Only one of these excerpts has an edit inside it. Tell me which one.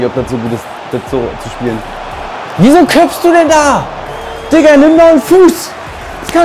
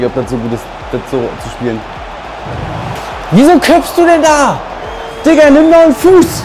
first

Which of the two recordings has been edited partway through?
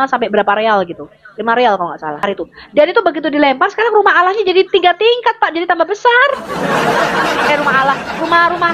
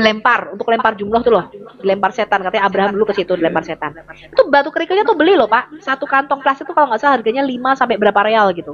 first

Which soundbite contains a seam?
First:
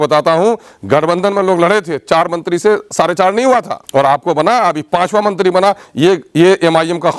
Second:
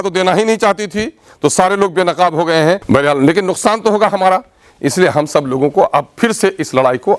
second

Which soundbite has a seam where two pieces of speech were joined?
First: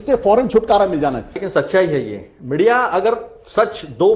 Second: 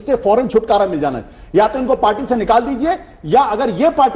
first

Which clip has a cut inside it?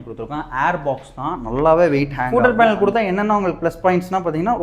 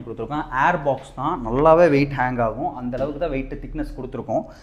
first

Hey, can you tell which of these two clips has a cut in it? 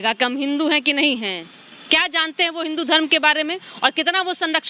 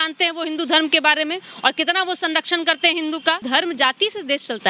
second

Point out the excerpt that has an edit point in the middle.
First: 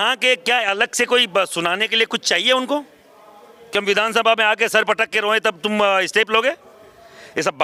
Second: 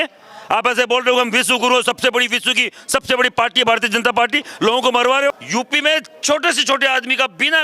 second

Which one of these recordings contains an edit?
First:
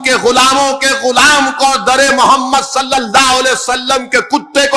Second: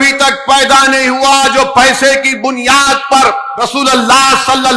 second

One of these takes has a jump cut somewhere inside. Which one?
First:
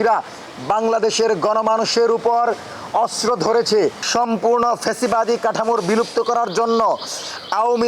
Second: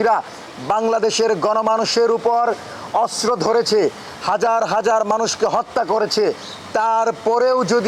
first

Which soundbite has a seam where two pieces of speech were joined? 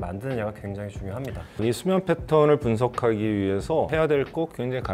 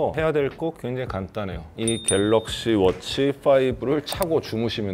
first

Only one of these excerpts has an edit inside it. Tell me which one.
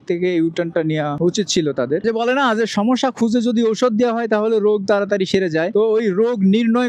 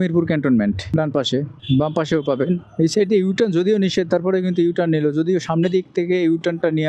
first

